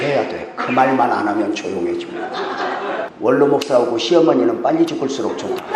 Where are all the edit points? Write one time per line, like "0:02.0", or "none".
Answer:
0:03.0